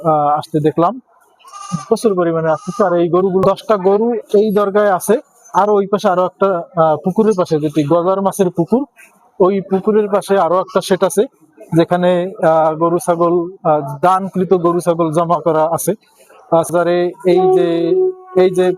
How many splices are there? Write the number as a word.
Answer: two